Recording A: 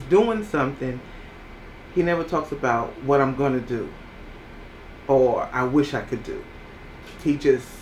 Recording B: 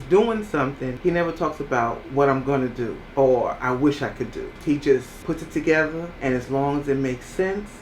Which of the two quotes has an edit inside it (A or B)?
B